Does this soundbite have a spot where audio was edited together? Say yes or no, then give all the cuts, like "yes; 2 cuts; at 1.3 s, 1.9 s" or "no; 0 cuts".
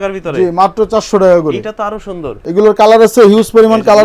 yes; 1 cut; at 2.4 s